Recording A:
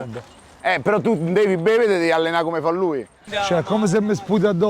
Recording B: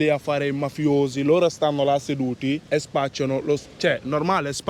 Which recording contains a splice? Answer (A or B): A